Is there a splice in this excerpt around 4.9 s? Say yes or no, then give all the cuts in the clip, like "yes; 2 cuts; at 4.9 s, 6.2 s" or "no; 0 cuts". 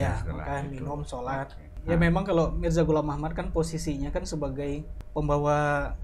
yes; 2 cuts; at 1.7 s, 4.9 s